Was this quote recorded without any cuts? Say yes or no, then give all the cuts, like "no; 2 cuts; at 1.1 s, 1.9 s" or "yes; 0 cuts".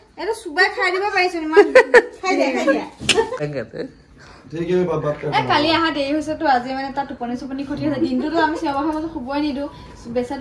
no; 1 cut; at 3.4 s